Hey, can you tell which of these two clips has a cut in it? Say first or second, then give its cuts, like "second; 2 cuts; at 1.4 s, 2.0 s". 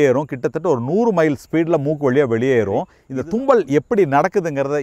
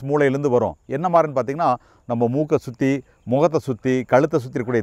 first; 1 cut; at 3.0 s